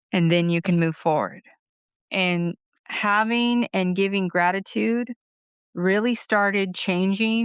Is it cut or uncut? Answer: cut